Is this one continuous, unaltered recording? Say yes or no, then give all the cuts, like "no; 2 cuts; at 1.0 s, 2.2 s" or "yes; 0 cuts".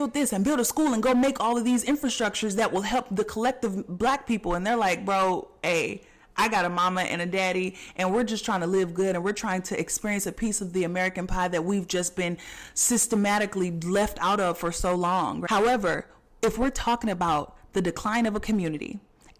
no; 1 cut; at 15.4 s